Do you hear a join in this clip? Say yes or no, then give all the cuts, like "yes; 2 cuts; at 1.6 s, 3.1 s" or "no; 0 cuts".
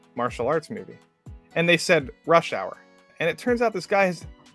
yes; 1 cut; at 3.1 s